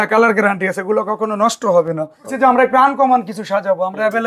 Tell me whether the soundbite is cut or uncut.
cut